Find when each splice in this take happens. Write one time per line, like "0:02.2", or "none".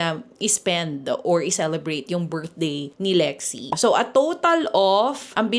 0:02.9
0:03.7